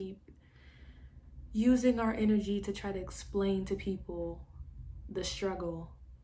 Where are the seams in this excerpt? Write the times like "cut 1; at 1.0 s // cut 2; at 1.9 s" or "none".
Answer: none